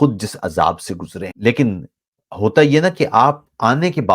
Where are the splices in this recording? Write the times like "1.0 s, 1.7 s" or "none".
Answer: 1.2 s